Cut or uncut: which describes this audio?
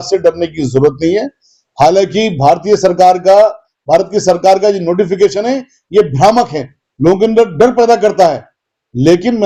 uncut